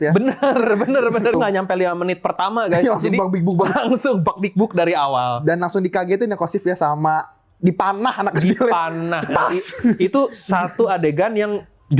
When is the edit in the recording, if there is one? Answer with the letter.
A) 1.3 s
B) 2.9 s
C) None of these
A